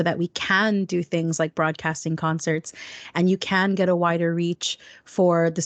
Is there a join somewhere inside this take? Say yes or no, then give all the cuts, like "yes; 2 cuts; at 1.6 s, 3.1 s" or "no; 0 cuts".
no; 0 cuts